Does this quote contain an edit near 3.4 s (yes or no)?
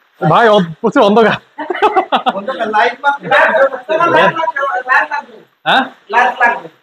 no